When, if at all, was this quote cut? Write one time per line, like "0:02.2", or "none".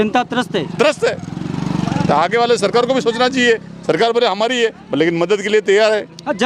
none